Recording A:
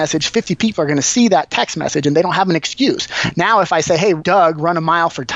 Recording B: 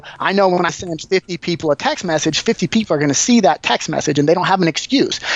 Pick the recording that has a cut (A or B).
A